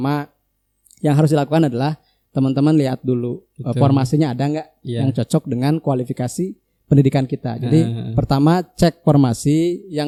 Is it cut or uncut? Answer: uncut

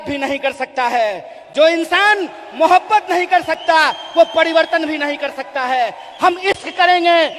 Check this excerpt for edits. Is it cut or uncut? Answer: uncut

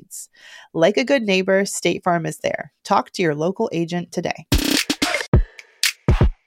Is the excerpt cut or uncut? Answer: cut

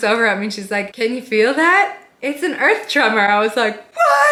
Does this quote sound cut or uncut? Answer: uncut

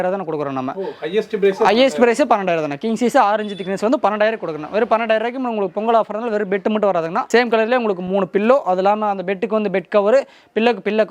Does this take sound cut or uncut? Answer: uncut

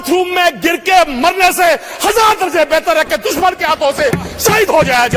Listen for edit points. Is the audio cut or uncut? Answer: uncut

